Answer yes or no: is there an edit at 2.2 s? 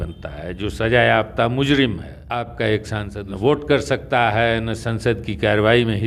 yes